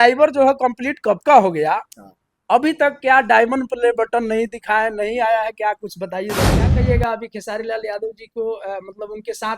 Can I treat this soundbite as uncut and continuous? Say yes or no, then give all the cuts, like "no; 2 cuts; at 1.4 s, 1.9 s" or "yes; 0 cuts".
no; 1 cut; at 6.7 s